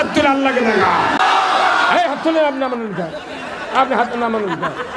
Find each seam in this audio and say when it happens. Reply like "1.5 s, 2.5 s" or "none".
1.2 s